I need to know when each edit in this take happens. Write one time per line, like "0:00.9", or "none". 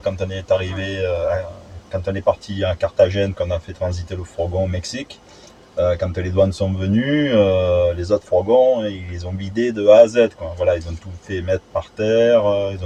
none